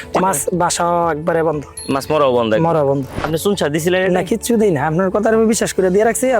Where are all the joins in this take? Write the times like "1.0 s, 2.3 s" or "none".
3.1 s